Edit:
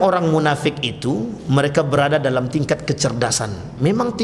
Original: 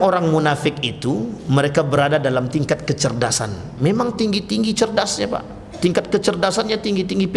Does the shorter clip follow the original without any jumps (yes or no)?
yes